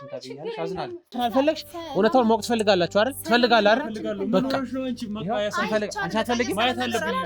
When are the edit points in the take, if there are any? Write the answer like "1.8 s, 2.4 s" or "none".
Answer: 1.1 s